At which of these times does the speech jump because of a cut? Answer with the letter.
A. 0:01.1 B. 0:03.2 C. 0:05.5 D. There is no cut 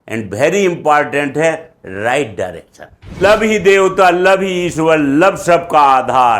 B